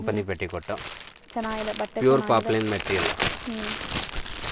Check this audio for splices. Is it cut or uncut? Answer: uncut